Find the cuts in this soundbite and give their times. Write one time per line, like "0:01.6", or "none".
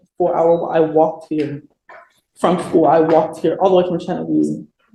none

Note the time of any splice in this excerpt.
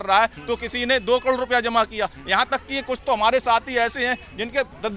none

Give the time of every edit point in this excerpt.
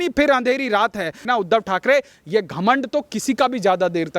0:01.3

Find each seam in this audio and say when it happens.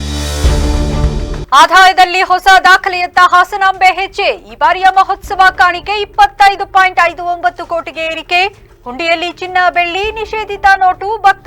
0:01.4

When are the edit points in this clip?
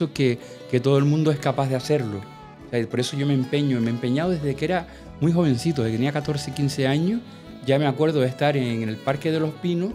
none

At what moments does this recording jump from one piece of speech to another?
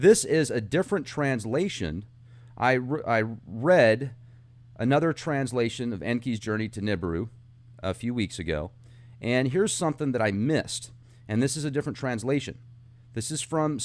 none

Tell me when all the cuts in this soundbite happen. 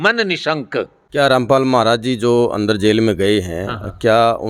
0:01.0

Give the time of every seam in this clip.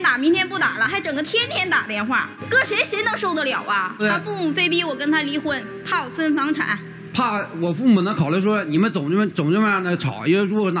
0:02.3
0:04.0

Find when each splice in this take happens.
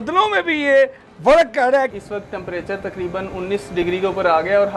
0:01.9

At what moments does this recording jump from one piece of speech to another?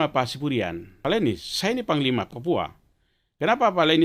0:01.0
0:02.3

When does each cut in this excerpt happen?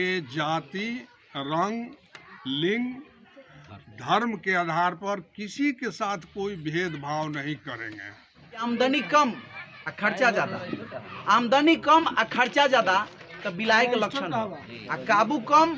0:08.6

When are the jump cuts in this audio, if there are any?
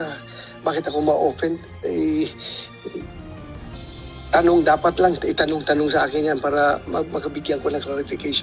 none

